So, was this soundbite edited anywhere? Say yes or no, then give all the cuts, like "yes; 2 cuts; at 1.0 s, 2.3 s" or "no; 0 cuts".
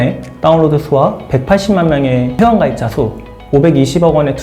yes; 1 cut; at 2.3 s